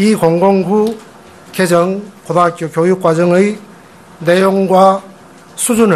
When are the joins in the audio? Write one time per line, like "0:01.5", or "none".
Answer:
0:04.4